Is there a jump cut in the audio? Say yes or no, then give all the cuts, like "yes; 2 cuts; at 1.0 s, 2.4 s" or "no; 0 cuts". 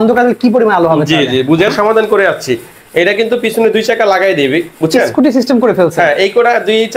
yes; 1 cut; at 1.7 s